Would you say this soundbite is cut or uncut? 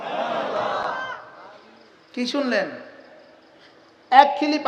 uncut